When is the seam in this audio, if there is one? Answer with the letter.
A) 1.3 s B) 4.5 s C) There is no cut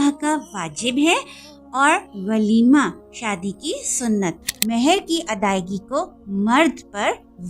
B